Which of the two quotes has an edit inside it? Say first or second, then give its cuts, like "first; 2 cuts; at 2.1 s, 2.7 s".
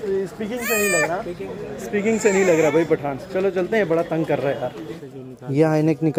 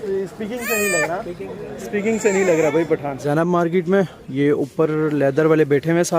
second; 1 cut; at 3.1 s